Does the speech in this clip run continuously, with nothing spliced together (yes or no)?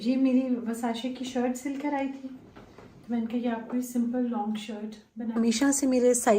no